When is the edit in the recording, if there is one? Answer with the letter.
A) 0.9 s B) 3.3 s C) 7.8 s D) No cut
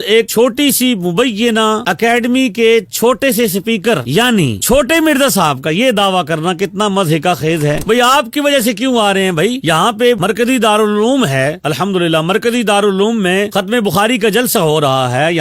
C